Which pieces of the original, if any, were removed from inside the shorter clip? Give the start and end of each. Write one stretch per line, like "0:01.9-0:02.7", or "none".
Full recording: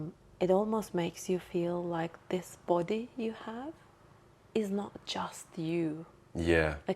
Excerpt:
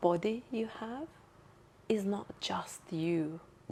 none